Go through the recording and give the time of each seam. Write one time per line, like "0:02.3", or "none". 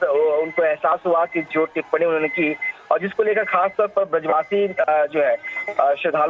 none